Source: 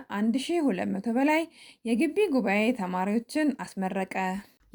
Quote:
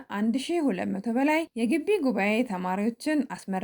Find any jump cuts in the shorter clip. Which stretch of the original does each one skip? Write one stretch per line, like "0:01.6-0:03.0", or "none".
0:01.5-0:01.8